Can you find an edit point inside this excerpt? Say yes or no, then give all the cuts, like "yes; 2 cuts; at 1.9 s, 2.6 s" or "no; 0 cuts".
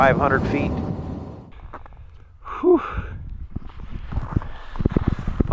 yes; 1 cut; at 1.0 s